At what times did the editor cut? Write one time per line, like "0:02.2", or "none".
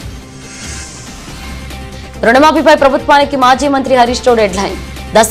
none